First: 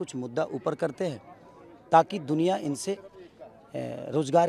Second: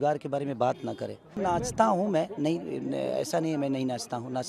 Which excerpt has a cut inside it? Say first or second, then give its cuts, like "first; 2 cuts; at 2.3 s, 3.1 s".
second; 1 cut; at 1.4 s